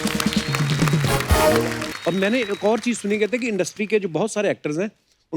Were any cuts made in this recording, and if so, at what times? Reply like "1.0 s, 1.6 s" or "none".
1.9 s